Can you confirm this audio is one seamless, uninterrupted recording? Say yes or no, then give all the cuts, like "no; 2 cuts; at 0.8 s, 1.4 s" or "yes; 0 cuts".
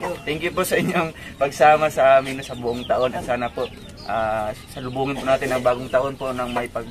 yes; 0 cuts